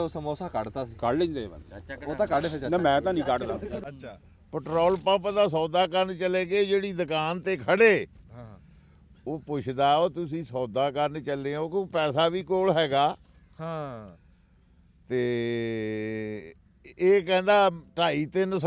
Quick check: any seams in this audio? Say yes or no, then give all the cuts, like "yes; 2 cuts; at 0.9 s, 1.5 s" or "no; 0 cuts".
yes; 1 cut; at 3.8 s